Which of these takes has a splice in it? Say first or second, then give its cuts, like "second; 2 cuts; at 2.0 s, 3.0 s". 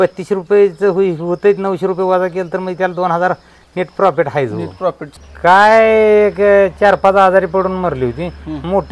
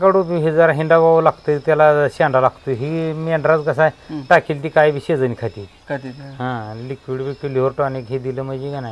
first; 1 cut; at 5.1 s